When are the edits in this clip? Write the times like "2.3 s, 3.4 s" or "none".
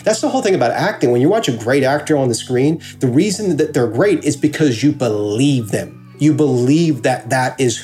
none